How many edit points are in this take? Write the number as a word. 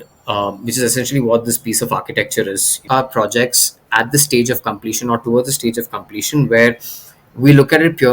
one